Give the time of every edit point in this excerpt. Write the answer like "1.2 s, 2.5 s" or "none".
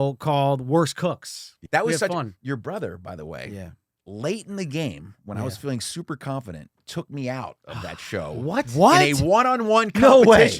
1.6 s